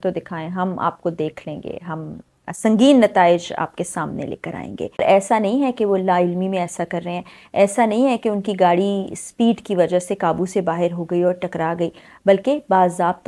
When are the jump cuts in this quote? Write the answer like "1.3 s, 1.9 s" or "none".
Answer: 5.0 s